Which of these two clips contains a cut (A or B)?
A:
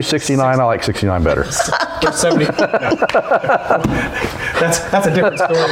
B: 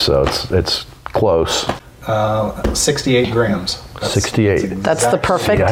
B